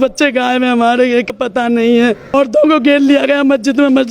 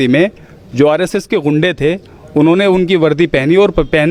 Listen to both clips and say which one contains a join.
first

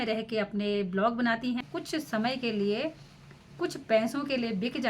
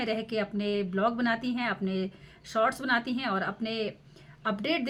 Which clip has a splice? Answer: first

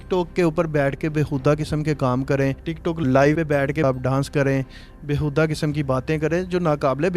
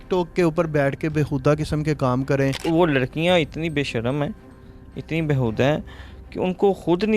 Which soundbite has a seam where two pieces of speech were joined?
second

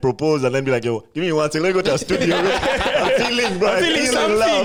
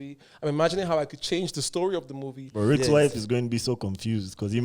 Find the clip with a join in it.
second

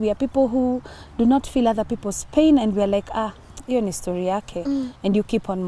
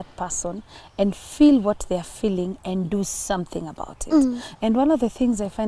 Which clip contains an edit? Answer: second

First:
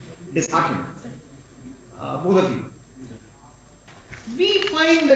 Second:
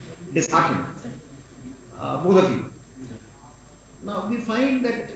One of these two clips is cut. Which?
first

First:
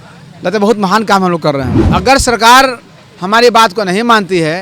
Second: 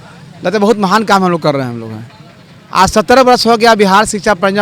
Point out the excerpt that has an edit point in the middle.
first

